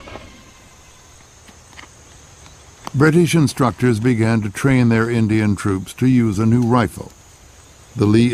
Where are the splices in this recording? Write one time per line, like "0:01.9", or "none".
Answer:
none